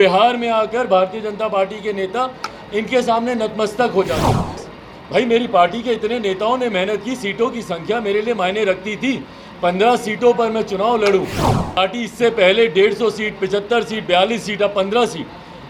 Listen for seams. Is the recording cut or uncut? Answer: cut